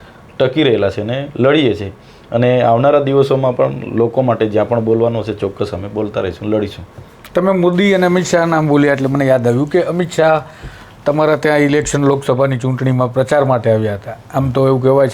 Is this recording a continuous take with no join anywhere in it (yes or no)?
yes